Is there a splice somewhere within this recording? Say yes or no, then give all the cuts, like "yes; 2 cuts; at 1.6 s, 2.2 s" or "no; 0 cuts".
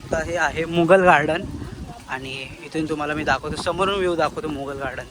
no; 0 cuts